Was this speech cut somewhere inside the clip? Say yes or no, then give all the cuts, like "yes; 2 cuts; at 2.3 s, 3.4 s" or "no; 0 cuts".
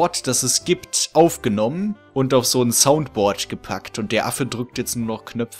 yes; 1 cut; at 2.0 s